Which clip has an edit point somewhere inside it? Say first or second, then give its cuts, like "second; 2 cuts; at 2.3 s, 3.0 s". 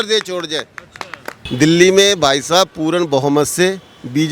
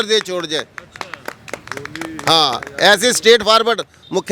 first; 1 cut; at 1.4 s